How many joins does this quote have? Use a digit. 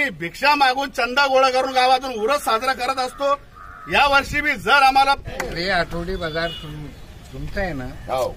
1